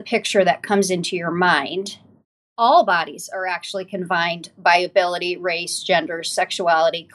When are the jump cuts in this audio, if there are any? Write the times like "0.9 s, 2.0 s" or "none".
2.5 s